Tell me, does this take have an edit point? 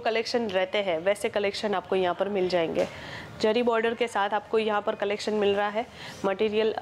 no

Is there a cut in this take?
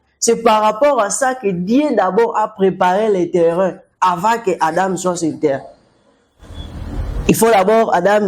no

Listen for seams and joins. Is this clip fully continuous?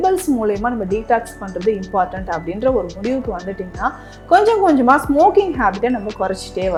yes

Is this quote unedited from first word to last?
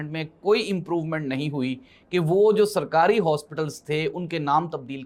yes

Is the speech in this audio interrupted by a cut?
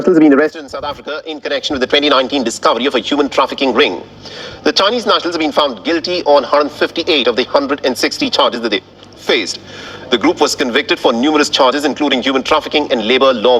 no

